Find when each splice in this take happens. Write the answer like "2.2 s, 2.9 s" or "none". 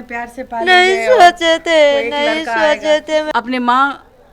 3.3 s